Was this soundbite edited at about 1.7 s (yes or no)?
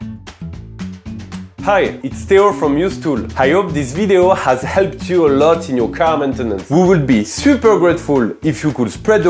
yes